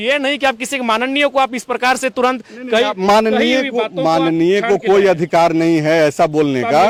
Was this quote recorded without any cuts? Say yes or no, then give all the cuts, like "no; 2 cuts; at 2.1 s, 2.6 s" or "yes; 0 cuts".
yes; 0 cuts